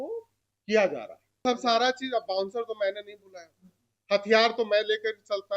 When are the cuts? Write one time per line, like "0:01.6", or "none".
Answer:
0:01.4